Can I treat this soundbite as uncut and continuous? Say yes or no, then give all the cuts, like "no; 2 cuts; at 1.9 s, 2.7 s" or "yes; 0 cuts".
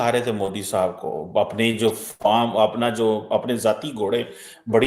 yes; 0 cuts